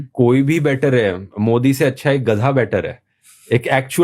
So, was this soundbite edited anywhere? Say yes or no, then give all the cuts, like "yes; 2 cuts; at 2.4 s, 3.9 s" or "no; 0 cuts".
yes; 1 cut; at 2.9 s